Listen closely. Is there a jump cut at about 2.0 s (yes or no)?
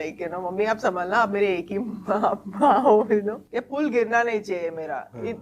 no